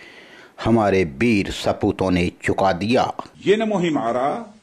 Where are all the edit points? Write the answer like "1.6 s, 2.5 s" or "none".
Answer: 3.3 s